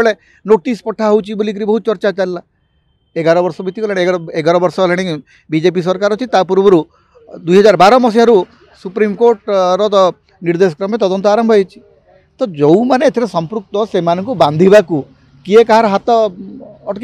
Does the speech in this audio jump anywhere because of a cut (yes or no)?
no